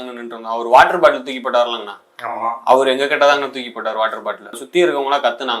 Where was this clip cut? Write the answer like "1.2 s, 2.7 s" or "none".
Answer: 4.6 s